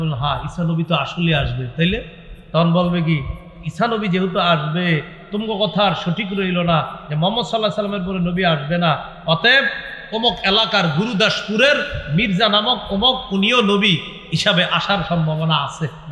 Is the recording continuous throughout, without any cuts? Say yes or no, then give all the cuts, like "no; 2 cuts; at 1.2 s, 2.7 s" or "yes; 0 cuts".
yes; 0 cuts